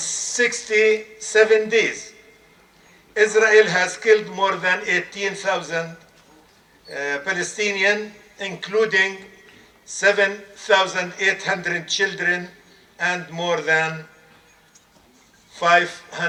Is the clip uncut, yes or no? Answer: yes